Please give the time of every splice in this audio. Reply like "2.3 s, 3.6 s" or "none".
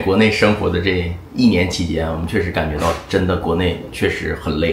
none